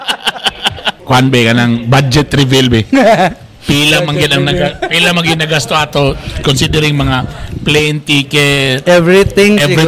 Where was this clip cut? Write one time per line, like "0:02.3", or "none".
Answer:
0:00.9